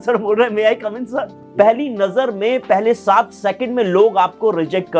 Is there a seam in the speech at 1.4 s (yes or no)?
yes